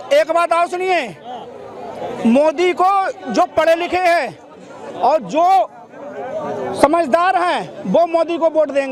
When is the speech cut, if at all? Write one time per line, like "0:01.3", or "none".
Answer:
none